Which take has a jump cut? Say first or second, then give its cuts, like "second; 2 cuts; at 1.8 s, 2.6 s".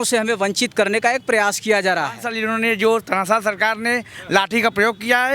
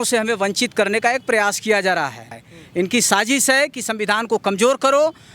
first; 1 cut; at 2.3 s